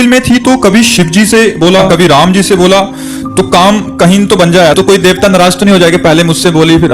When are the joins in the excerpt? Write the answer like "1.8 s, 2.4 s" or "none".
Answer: 1.9 s, 4.7 s